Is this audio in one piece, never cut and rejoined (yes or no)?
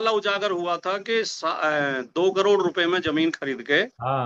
yes